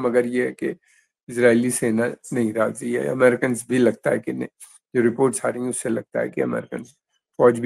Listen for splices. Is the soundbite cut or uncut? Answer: uncut